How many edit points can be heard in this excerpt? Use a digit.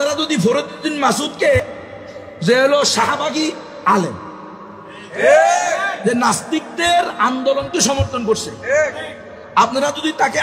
1